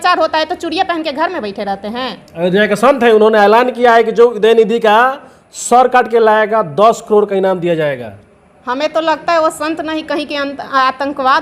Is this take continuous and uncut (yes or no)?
yes